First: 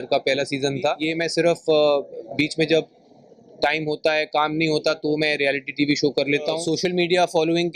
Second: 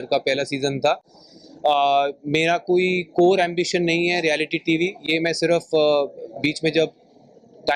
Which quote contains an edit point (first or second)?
first